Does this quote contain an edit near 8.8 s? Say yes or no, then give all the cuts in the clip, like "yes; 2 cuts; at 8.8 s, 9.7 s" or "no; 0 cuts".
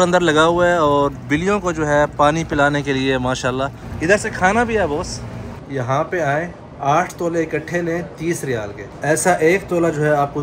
yes; 3 cuts; at 3.9 s, 5.6 s, 8.8 s